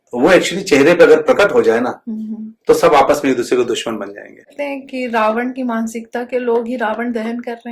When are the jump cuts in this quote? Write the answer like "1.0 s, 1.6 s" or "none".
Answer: 4.5 s